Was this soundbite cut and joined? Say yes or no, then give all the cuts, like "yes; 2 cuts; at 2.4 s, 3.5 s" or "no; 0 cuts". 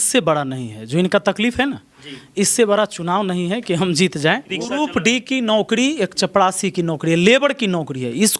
yes; 1 cut; at 4.6 s